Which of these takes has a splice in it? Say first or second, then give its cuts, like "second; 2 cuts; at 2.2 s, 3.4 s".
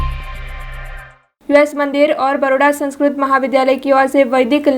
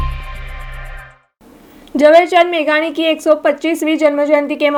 first; 1 cut; at 1.2 s